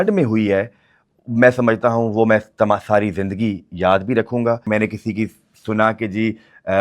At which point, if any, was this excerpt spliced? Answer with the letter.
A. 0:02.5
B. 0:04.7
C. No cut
B